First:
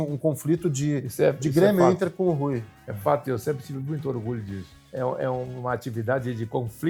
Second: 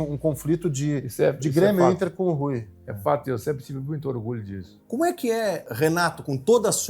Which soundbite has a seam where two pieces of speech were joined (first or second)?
second